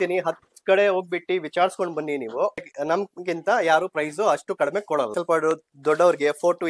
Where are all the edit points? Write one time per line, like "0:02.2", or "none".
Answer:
none

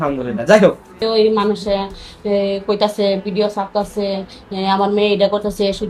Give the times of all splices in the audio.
0:01.0

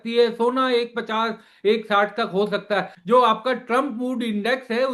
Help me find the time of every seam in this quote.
0:02.9

